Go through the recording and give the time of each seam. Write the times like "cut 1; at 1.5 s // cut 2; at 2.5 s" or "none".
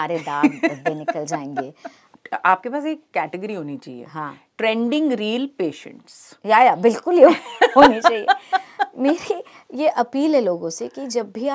cut 1; at 2.1 s

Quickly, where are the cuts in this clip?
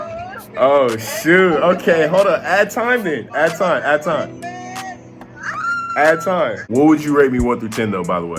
cut 1; at 6.6 s

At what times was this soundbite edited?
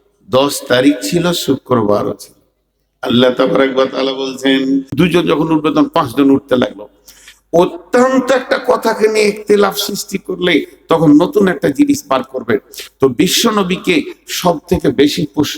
cut 1; at 5.0 s

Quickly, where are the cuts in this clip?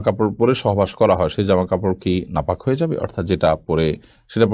none

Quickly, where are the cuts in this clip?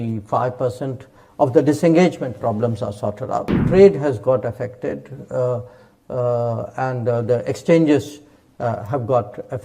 cut 1; at 3.6 s

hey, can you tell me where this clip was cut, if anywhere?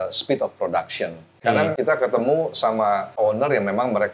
cut 1; at 1.7 s // cut 2; at 3.2 s

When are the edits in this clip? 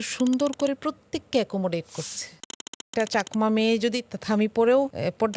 cut 1; at 2.9 s

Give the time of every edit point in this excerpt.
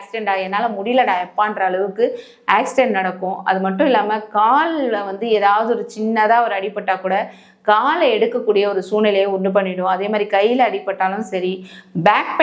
none

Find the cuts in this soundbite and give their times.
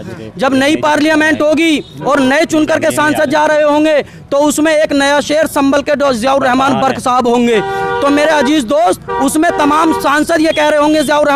none

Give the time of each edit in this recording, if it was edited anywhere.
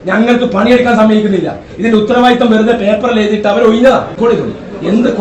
cut 1; at 4.1 s

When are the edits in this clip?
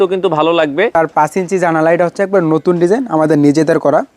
cut 1; at 0.9 s

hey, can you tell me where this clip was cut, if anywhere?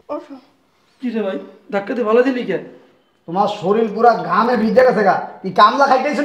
none

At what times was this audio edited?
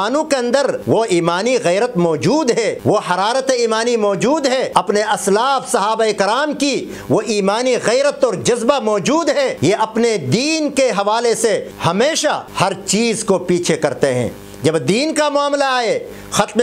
cut 1; at 0.8 s // cut 2; at 2.8 s // cut 3; at 4.9 s // cut 4; at 9.5 s // cut 5; at 11.7 s // cut 6; at 12.5 s

